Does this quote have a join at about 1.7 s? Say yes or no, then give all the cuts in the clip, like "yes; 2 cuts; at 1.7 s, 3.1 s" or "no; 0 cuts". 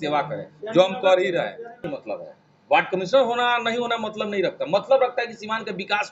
yes; 1 cut; at 1.7 s